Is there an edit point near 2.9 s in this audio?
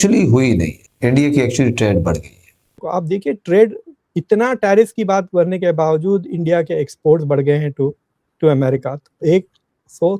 yes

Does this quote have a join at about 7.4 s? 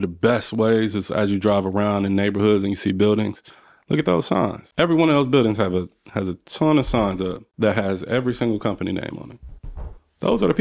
yes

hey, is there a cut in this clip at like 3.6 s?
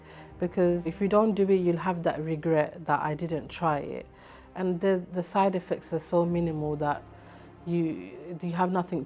no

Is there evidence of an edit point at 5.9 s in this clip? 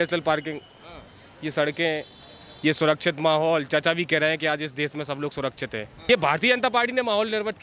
yes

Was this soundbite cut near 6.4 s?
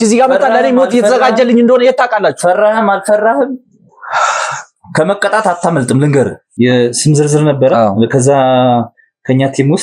yes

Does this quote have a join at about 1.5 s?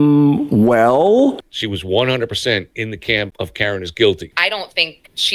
yes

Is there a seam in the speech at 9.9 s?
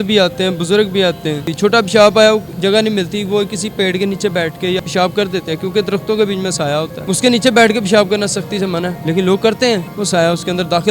yes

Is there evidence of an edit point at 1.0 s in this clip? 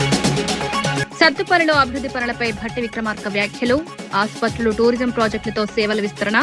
yes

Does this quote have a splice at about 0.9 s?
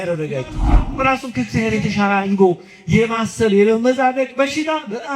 yes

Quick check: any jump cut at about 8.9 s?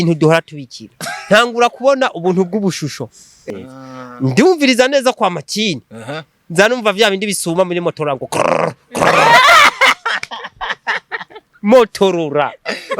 no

